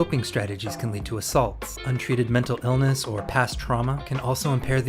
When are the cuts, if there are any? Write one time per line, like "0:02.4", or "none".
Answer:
0:01.7